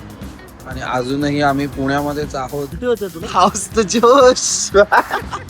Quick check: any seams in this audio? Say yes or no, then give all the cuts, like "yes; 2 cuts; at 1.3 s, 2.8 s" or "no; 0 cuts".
yes; 1 cut; at 2.7 s